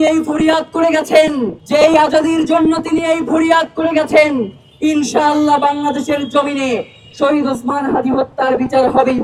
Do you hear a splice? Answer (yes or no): no